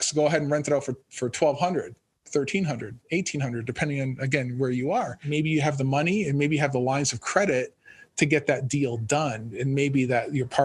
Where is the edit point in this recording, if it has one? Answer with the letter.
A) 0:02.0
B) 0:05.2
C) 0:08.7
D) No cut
B